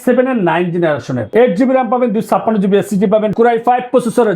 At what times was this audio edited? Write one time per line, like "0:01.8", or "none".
0:03.3